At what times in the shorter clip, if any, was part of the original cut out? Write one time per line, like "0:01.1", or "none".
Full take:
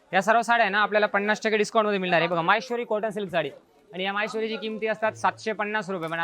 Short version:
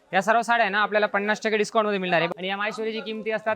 0:02.3